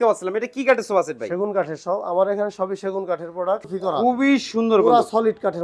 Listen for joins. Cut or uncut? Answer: cut